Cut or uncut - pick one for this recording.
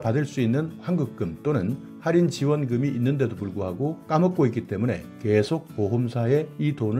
uncut